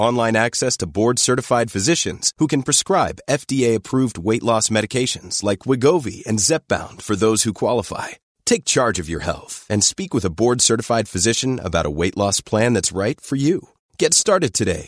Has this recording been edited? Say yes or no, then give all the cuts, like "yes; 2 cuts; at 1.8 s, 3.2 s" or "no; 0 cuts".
no; 0 cuts